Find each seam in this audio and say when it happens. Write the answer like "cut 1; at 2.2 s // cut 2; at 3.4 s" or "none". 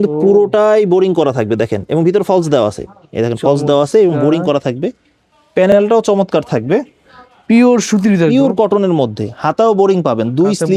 none